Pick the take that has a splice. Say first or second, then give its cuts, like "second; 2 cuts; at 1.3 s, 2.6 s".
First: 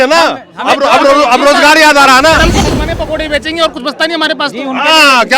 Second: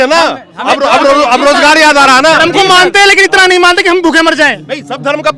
first; 1 cut; at 2.6 s